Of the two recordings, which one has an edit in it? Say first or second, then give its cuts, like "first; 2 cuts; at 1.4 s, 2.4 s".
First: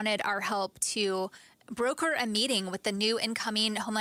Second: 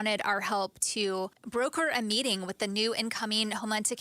second; 1 cut; at 1.4 s